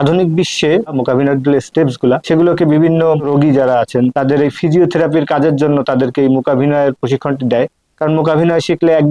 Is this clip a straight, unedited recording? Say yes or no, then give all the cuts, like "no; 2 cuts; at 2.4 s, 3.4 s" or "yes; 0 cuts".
no; 4 cuts; at 1.0 s, 2.2 s, 3.2 s, 4.1 s